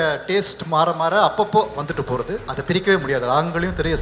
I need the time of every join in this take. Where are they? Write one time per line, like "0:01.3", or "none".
0:02.5